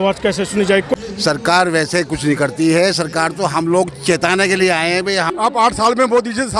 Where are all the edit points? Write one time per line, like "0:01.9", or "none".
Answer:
0:00.9
0:05.3